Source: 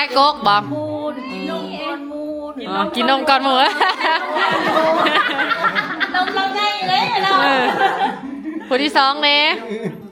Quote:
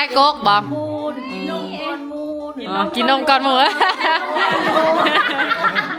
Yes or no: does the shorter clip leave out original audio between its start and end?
no